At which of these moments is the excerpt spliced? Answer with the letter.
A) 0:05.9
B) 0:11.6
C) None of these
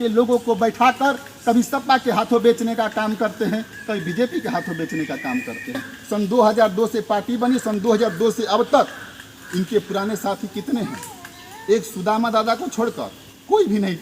A